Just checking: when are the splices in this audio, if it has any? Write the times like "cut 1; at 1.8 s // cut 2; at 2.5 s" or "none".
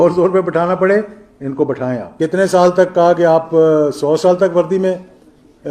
cut 1; at 2.1 s